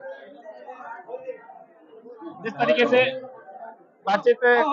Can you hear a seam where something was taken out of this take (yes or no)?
no